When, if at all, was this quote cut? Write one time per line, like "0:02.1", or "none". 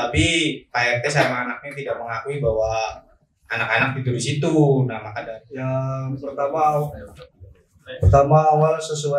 0:05.1